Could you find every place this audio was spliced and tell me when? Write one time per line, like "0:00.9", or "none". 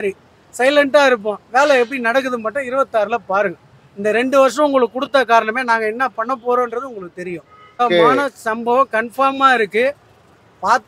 0:07.8